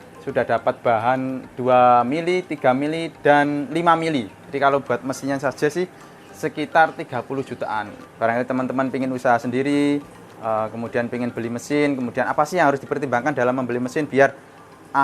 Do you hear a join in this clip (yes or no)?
yes